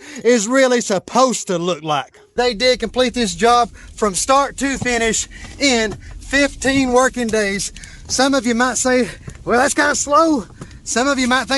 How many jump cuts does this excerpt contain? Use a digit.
1